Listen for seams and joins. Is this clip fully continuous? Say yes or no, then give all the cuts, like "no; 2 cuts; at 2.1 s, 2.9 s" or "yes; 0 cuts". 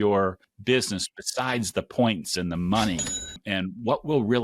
no; 1 cut; at 3.4 s